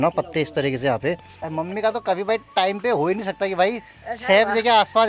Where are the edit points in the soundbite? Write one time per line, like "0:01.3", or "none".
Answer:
0:01.4